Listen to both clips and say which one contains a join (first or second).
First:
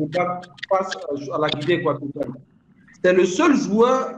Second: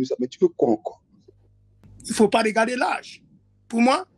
second